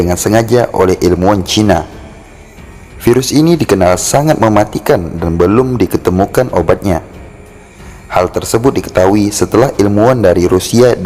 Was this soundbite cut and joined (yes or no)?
no